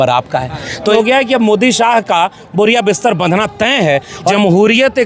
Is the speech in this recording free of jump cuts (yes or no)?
no